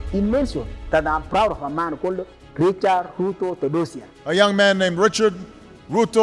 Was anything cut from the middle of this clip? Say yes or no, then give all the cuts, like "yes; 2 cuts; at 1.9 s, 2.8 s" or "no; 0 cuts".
no; 0 cuts